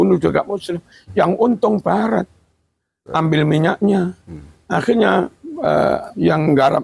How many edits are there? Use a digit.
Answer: 0